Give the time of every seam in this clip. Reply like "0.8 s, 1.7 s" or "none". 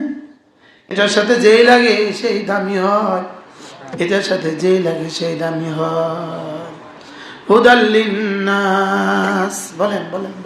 0.9 s